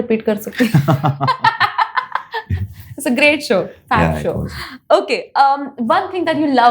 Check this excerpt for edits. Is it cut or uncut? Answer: uncut